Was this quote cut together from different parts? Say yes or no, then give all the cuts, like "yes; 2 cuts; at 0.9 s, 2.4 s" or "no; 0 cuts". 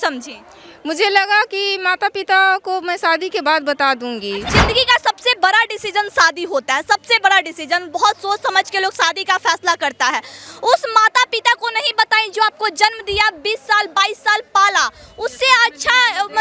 yes; 1 cut; at 4.5 s